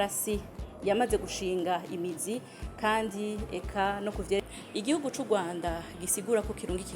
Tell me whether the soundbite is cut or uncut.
cut